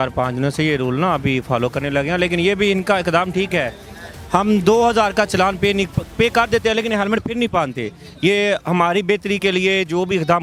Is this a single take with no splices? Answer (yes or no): yes